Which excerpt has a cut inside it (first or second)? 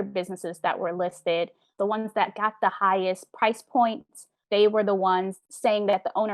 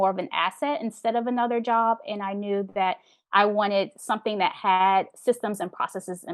first